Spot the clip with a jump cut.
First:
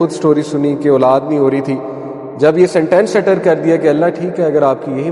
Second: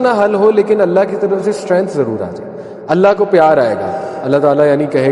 second; 1 cut; at 4.1 s

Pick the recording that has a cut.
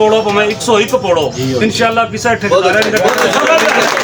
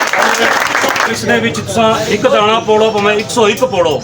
second; 1 cut; at 1.1 s

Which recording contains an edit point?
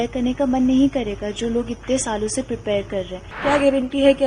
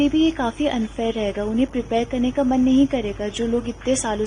first; 1 cut; at 3.3 s

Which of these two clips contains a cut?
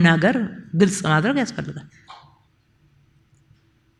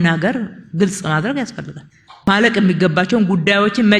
second; 1 cut; at 2.3 s

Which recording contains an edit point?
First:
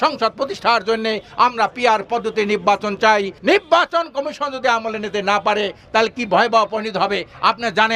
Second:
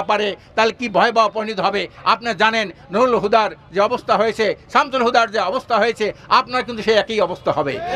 first; 1 cut; at 3.3 s

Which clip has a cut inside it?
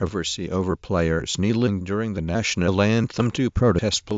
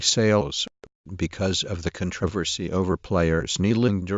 second; 1 cut; at 1.1 s

